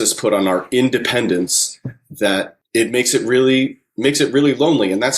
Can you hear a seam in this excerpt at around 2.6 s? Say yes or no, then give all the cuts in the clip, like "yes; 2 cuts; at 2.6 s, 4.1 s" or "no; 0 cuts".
yes; 1 cut; at 2.6 s